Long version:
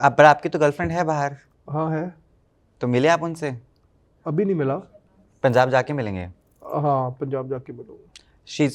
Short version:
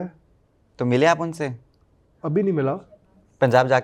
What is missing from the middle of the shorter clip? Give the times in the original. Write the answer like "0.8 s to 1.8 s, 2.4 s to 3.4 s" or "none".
none